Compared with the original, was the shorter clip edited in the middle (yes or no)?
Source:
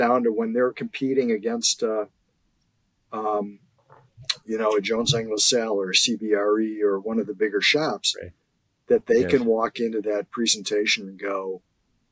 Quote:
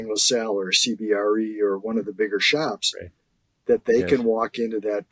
no